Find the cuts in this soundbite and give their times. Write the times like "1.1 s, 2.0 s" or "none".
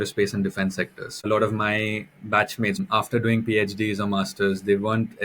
1.0 s, 2.8 s